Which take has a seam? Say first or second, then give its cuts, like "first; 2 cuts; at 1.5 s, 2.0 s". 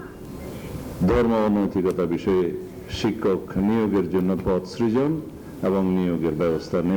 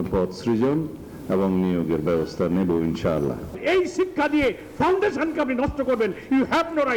second; 1 cut; at 3.6 s